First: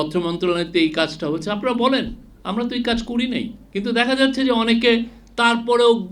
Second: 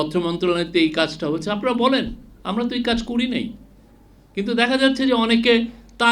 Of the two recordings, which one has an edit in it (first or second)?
first